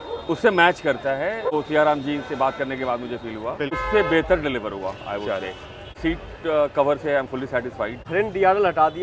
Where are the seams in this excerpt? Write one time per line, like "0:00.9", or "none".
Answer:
0:01.5
0:03.8
0:06.0
0:08.0